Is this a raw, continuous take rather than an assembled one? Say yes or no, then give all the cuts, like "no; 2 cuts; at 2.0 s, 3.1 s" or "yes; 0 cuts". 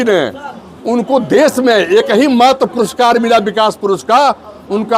yes; 0 cuts